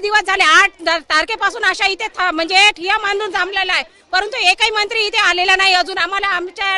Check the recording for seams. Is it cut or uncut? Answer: uncut